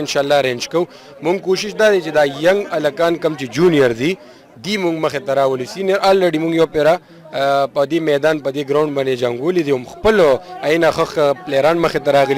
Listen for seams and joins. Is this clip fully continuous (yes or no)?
yes